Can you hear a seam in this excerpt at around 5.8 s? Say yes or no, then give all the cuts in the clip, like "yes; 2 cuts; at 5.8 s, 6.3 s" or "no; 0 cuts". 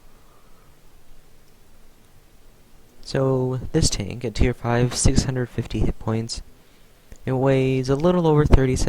yes; 1 cut; at 5.8 s